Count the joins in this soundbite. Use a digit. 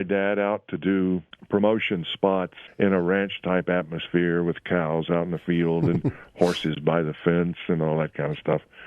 2